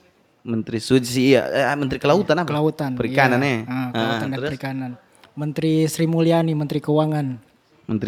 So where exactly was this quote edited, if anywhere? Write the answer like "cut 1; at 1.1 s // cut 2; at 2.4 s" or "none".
none